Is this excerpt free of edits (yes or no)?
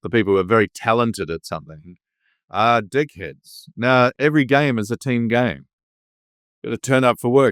no